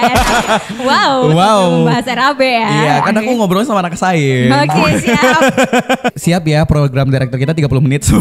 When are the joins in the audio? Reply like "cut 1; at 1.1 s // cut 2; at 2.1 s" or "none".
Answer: cut 1; at 6.1 s